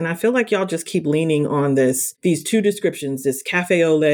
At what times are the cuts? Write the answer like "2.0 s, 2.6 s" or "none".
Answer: 2.1 s